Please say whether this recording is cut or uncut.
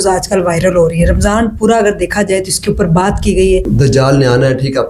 cut